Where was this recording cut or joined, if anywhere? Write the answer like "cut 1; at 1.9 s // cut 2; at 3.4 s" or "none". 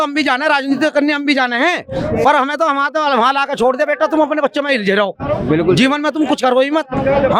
none

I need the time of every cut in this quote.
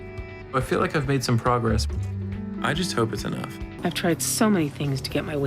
cut 1; at 3.6 s

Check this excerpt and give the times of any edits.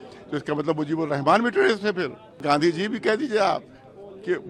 cut 1; at 2.4 s

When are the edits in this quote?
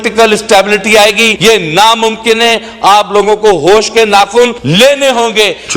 cut 1; at 1.3 s // cut 2; at 4.6 s

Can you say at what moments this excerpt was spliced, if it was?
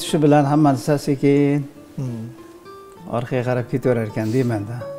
none

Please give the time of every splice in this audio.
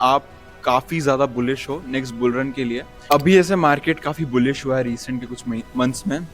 cut 1; at 3.0 s

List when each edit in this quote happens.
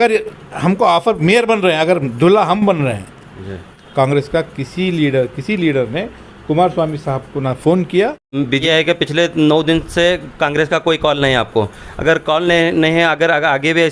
cut 1; at 3.8 s // cut 2; at 8.6 s

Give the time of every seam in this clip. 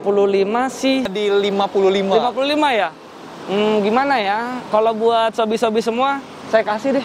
cut 1; at 1.1 s

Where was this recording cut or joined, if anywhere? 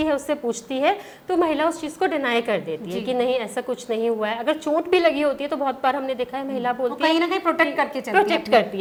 none

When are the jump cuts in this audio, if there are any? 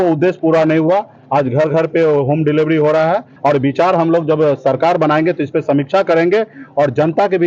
cut 1; at 3.3 s

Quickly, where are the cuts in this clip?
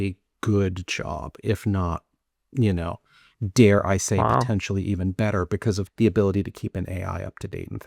cut 1; at 5.9 s

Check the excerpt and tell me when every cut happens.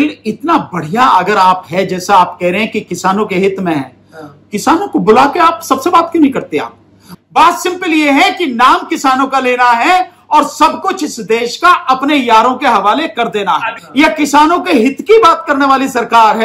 cut 1; at 7.1 s // cut 2; at 13.8 s

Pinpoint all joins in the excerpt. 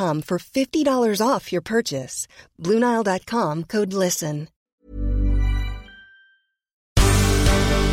cut 1; at 4.6 s // cut 2; at 6.8 s

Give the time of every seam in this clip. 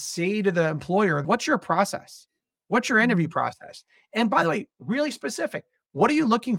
cut 1; at 1.2 s

